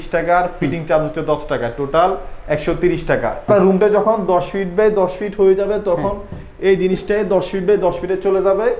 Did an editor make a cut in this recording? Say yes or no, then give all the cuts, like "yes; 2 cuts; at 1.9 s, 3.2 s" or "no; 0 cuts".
yes; 1 cut; at 3.5 s